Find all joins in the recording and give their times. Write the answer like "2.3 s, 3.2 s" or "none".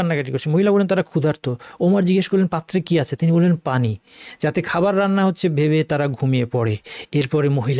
none